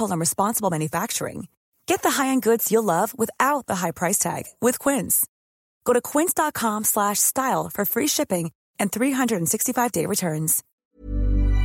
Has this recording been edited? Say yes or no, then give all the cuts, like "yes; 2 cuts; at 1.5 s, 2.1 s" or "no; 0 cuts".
yes; 1 cut; at 10.6 s